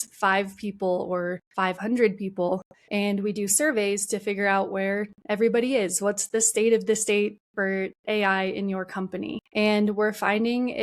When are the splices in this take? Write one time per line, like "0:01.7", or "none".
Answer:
0:01.4
0:02.8
0:09.4